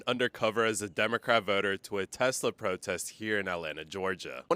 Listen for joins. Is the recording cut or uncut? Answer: cut